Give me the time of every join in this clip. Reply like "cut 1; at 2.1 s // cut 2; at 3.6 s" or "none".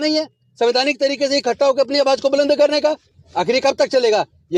none